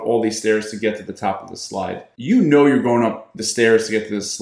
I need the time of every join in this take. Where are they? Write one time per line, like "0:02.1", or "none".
0:02.1